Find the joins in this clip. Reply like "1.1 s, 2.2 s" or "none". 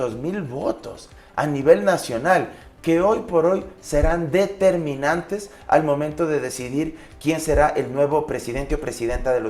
none